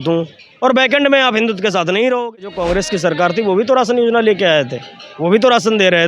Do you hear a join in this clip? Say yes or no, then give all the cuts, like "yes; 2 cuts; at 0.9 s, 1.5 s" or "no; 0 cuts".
yes; 1 cut; at 2.6 s